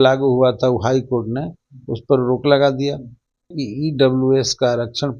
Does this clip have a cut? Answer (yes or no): yes